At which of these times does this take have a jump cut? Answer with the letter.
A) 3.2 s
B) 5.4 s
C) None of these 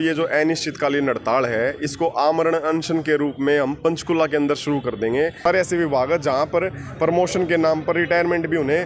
B